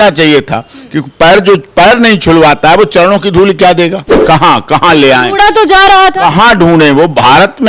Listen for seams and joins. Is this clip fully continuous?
no; 1 cut; at 4.1 s

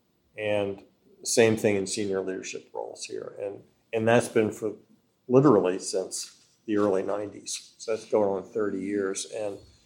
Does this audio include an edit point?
no; 0 cuts

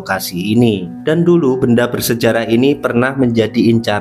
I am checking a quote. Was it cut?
yes; 1 cut; at 0.9 s

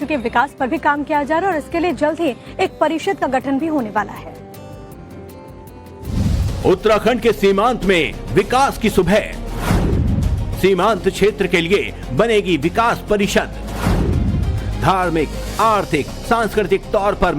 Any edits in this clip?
yes; 1 cut; at 4.9 s

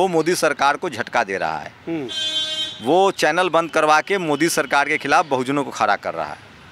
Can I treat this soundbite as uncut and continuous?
yes; 0 cuts

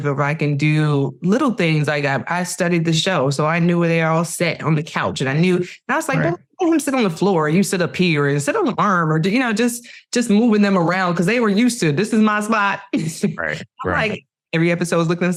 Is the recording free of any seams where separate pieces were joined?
yes; 0 cuts

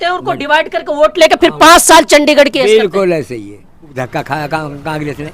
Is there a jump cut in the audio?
yes; 1 cut; at 3.9 s

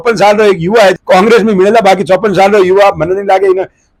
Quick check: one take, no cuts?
yes; 0 cuts

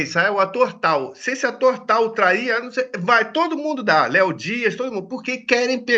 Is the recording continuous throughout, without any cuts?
yes; 0 cuts

